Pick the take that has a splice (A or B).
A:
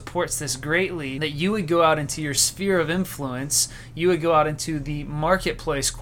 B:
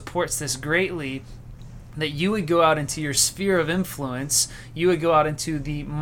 A